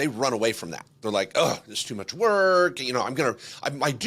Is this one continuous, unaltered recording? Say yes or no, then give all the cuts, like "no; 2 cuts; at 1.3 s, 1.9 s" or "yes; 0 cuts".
yes; 0 cuts